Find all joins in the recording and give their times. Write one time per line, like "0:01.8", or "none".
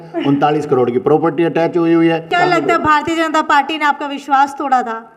0:02.3